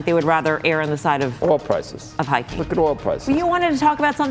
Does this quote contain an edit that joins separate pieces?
no; 0 cuts

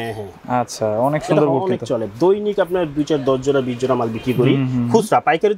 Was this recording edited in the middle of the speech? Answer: no; 0 cuts

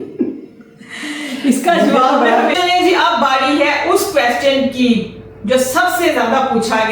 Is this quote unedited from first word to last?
no; 1 cut; at 2.5 s

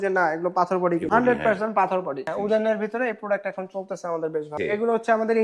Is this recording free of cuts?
no; 3 cuts; at 1.1 s, 2.3 s, 4.5 s

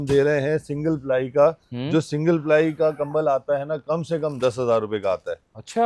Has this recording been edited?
no; 0 cuts

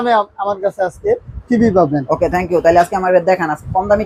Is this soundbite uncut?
yes; 0 cuts

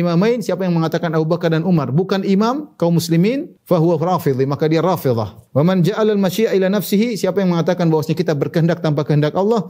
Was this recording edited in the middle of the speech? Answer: yes; 2 cuts; at 3.5 s, 5.3 s

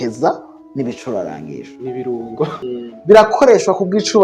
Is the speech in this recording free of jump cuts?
no; 1 cut; at 2.5 s

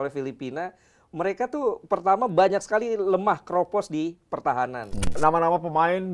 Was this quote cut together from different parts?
yes; 1 cut; at 5.2 s

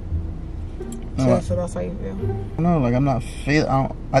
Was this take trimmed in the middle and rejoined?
yes; 1 cut; at 2.6 s

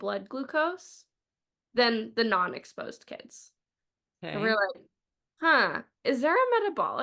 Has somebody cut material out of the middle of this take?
no; 0 cuts

